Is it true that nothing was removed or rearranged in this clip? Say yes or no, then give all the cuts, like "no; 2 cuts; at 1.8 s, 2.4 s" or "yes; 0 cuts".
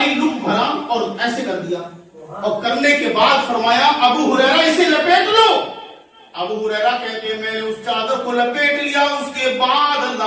yes; 0 cuts